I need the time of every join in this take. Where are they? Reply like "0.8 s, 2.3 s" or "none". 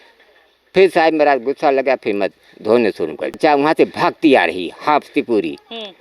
3.4 s